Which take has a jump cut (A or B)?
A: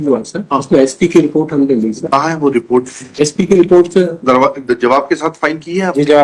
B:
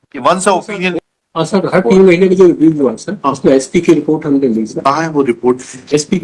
B